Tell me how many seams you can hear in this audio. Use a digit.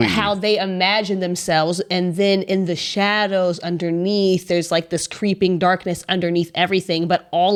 0